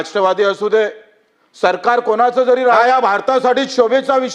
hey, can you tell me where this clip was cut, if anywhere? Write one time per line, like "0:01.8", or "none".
0:02.8